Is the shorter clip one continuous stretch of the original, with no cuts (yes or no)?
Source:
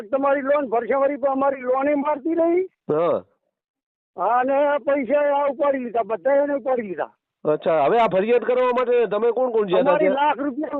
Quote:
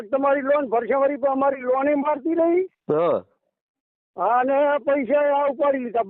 yes